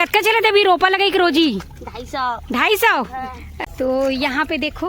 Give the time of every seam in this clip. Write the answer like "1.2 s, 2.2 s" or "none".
3.4 s